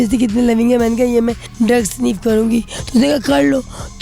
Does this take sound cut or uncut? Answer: cut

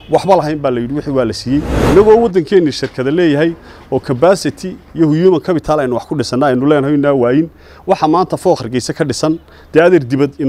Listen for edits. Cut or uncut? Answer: cut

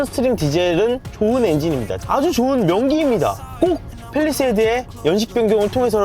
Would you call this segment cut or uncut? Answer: cut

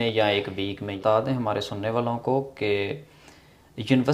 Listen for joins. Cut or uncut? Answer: cut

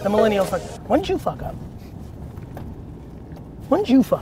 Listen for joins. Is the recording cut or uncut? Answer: uncut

